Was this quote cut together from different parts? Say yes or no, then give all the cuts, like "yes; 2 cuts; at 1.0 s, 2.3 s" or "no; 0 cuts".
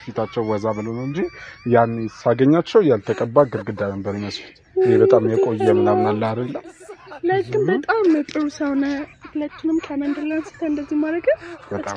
no; 0 cuts